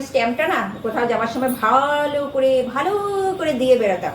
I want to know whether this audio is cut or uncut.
uncut